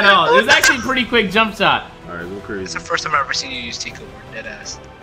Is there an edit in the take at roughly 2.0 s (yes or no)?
yes